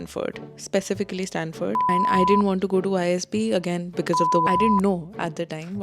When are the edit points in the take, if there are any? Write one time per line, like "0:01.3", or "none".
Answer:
0:01.9
0:04.4